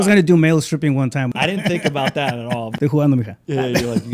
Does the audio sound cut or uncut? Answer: cut